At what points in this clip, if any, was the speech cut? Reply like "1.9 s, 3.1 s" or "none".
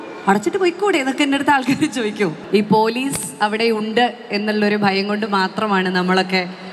2.4 s